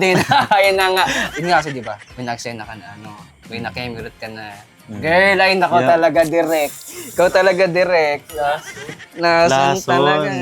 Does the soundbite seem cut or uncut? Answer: cut